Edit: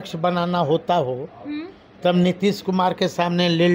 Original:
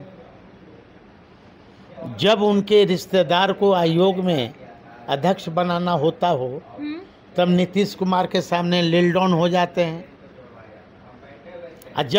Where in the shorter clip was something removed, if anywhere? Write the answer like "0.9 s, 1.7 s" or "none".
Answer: none